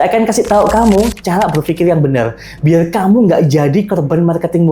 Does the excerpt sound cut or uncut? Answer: uncut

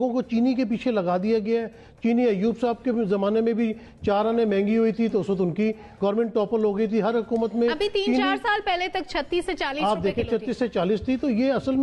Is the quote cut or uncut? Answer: uncut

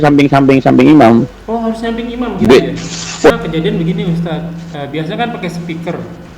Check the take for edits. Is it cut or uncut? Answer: cut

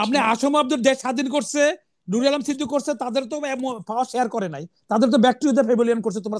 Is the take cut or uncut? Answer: uncut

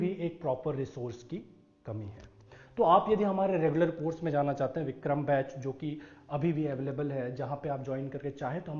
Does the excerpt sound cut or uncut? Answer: uncut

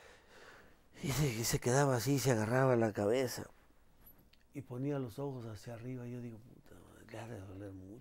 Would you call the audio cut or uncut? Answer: uncut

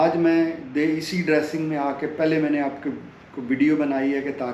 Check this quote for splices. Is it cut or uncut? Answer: uncut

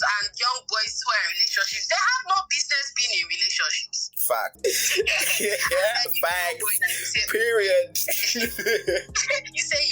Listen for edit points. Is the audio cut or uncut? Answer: cut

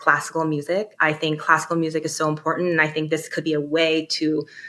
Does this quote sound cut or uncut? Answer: uncut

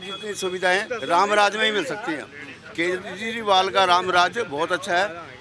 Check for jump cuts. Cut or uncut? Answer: uncut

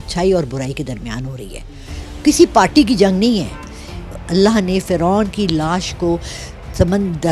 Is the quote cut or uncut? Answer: cut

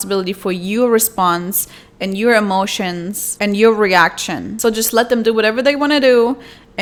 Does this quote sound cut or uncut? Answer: uncut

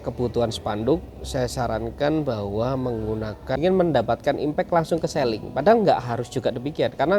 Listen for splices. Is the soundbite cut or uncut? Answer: cut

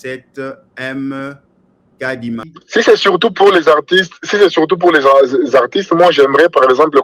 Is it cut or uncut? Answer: cut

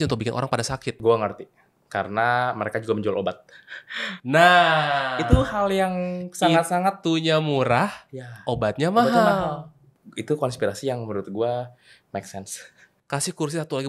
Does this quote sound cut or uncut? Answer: uncut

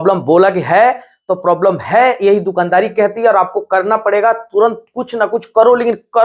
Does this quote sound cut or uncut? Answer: uncut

